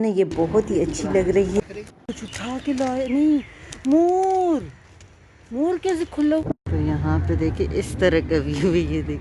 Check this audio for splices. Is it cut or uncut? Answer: cut